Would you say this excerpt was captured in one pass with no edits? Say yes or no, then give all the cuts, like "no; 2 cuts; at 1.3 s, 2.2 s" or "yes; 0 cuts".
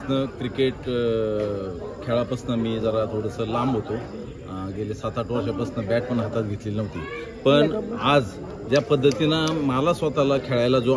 yes; 0 cuts